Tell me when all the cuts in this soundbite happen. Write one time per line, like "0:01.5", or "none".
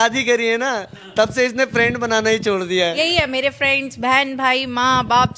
0:03.0